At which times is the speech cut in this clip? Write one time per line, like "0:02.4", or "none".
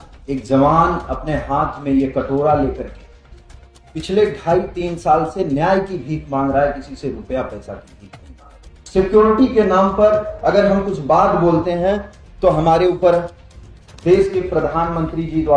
none

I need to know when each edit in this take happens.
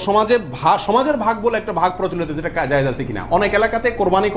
none

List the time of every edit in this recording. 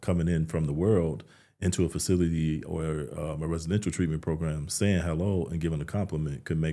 none

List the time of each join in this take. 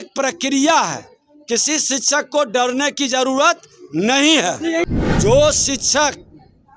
0:04.9

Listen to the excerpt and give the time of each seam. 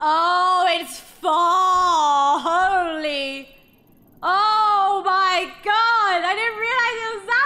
none

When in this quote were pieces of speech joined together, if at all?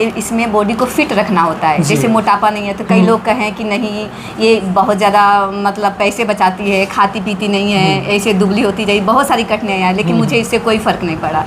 none

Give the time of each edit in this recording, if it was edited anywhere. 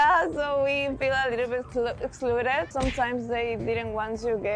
0:02.7

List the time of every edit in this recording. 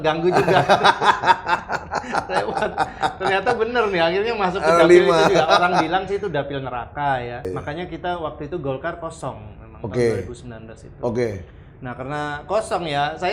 0:07.5

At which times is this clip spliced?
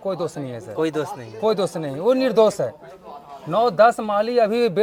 none

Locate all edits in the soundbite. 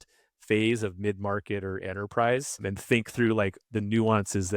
none

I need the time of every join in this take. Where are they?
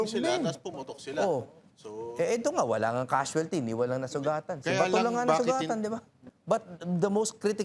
0:06.2

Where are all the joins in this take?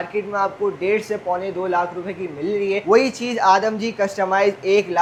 none

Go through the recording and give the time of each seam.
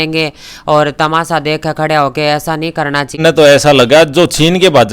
0:03.2

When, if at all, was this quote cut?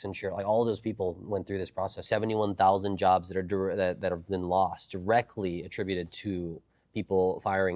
0:02.0

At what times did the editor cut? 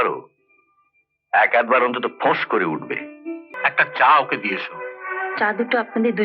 0:03.5

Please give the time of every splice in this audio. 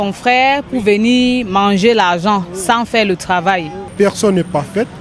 0:03.9

